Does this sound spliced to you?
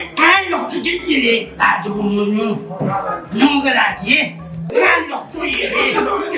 no; 0 cuts

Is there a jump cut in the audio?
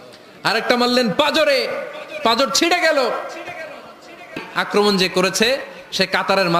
yes; 1 cut; at 4.5 s

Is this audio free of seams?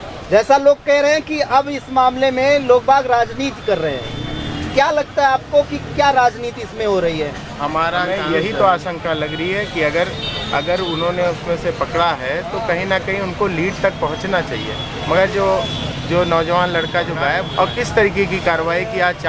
no; 2 cuts; at 8.1 s, 17.5 s

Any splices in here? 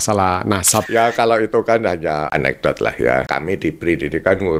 yes; 3 cuts; at 0.9 s, 2.3 s, 3.3 s

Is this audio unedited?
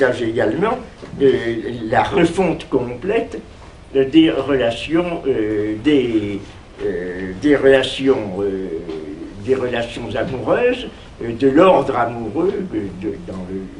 no; 1 cut; at 10.8 s

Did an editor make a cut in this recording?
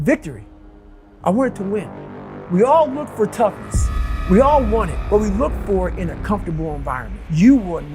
yes; 1 cut; at 2.0 s

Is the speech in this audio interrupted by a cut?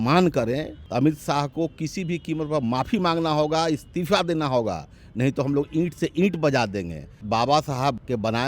yes; 2 cuts; at 0.8 s, 7.2 s

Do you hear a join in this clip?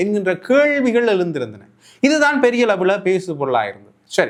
no; 0 cuts

